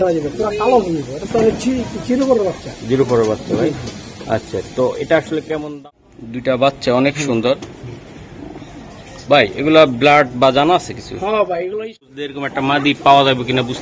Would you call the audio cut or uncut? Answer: cut